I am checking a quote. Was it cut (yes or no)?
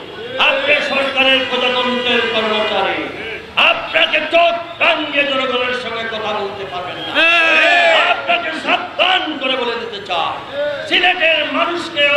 no